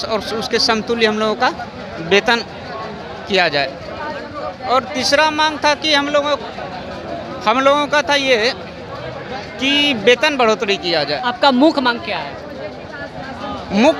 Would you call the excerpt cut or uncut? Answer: uncut